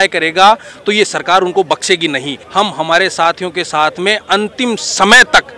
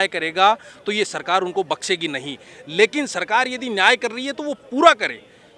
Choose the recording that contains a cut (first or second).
first